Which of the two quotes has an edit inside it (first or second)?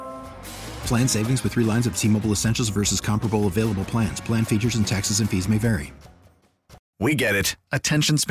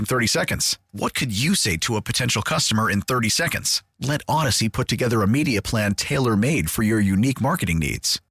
first